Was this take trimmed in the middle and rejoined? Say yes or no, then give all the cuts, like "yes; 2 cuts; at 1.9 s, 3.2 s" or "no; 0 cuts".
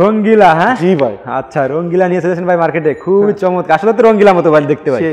no; 0 cuts